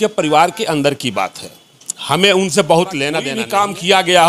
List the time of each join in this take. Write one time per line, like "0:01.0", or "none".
0:03.4